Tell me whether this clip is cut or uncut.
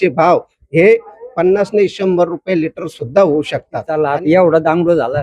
cut